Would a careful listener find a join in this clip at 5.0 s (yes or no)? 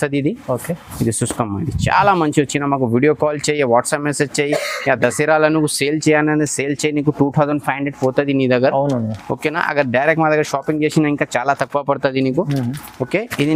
no